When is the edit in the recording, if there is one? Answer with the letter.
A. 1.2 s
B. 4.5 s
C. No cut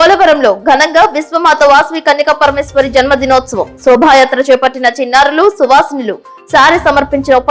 C